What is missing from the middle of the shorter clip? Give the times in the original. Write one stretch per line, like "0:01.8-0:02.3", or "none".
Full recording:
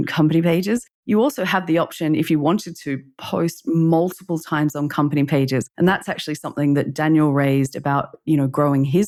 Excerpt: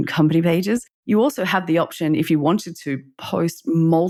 none